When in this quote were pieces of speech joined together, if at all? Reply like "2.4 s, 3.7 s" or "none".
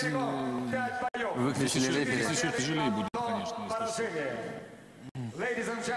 none

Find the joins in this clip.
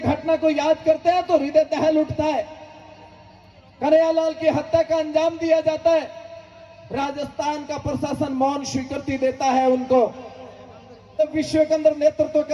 11.2 s

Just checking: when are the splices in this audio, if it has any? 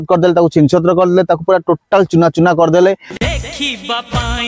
3.1 s

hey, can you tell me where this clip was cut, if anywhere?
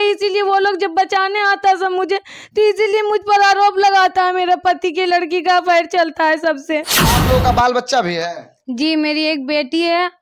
6.9 s

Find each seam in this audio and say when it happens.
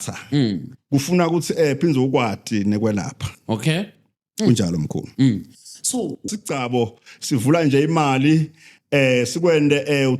6.3 s

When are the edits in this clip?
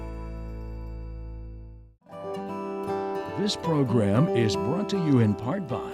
2.2 s, 3.4 s

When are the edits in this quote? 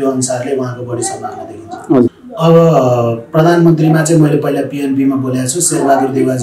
2.2 s

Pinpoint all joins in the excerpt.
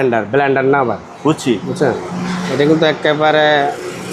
none

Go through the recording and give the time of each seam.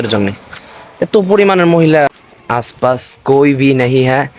2.1 s

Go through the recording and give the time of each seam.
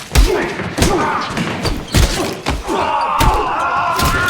2.8 s

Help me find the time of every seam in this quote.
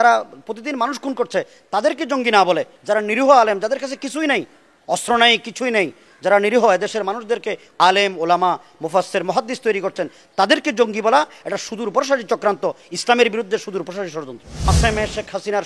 2.7 s, 7.7 s, 14.7 s

